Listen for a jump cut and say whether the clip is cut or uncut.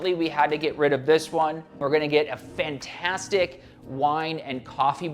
cut